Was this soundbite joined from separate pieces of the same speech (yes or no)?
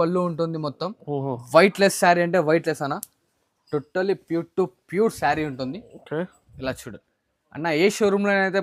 no